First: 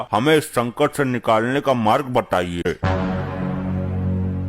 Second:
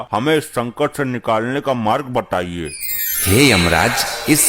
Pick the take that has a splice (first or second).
first